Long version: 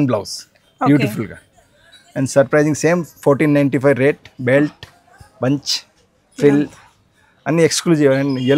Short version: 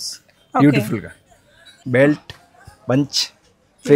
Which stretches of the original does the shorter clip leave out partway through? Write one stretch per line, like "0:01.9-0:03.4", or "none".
0:02.0-0:04.3